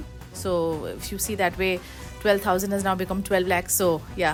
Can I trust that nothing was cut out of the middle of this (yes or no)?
yes